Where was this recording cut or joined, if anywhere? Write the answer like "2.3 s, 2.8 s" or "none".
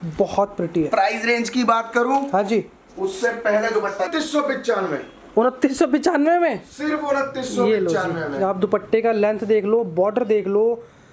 4.1 s